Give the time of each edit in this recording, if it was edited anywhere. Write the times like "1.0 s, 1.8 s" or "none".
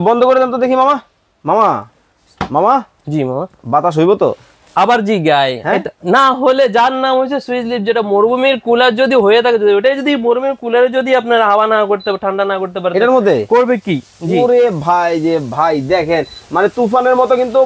none